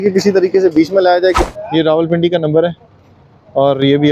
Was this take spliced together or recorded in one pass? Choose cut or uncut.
cut